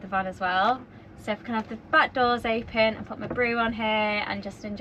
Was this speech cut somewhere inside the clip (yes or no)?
no